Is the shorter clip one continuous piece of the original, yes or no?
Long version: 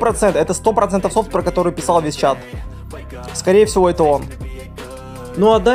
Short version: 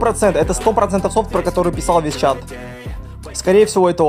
yes